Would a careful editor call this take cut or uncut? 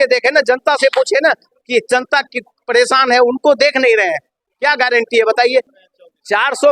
cut